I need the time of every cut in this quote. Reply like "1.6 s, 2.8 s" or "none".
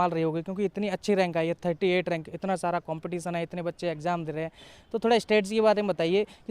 none